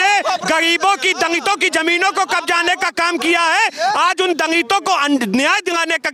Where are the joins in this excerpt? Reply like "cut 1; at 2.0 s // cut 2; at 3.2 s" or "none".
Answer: none